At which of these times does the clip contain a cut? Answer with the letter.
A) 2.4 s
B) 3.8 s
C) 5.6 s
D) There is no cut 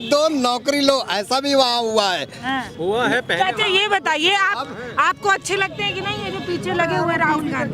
D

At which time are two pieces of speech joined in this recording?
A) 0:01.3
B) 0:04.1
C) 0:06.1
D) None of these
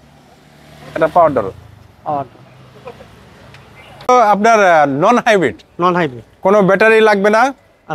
B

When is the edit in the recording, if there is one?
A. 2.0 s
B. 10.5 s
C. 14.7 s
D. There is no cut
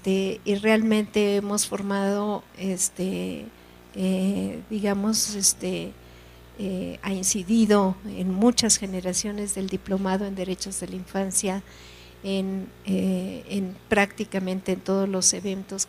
A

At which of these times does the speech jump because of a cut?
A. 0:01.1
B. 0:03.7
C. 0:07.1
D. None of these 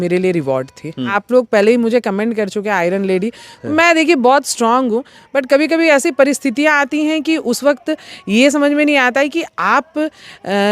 A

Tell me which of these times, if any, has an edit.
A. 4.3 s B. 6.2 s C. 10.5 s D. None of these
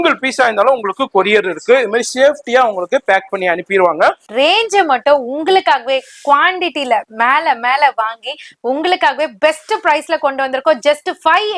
A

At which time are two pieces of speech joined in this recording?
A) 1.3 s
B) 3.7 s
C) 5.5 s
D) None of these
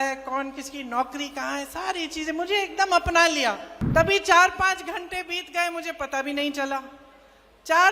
B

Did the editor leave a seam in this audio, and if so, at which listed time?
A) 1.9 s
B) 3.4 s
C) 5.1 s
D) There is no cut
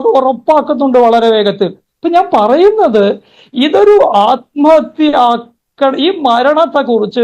A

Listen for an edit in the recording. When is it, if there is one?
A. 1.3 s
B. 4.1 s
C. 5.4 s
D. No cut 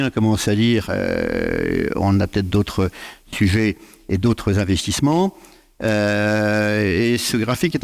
D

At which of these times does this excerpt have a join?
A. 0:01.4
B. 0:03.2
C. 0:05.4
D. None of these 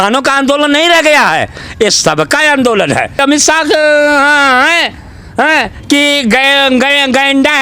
B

